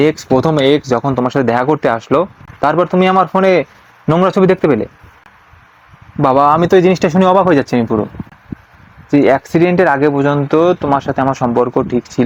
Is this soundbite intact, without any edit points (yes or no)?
yes